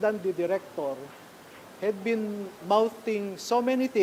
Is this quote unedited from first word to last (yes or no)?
yes